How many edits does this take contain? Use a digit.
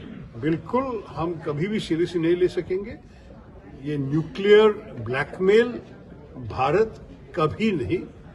0